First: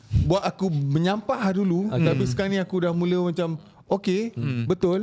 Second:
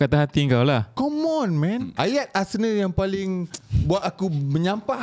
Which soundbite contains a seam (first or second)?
second